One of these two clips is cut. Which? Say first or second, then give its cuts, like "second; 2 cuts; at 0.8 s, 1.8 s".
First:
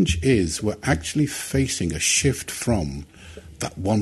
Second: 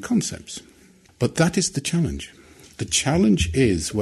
second; 1 cut; at 1.0 s